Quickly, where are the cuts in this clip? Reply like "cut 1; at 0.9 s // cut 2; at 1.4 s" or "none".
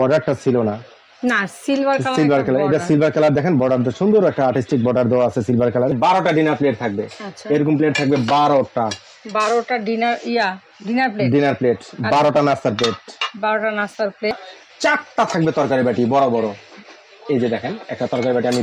cut 1; at 5.9 s // cut 2; at 14.5 s